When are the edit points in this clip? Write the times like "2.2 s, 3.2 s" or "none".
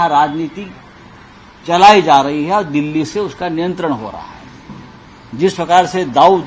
none

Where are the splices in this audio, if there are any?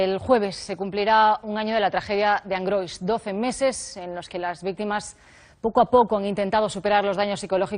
6.1 s

